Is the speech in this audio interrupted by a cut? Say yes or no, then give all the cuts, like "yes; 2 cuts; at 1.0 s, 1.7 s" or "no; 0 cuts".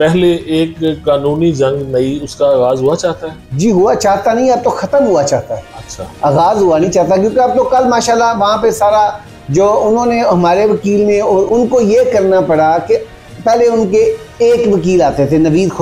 no; 0 cuts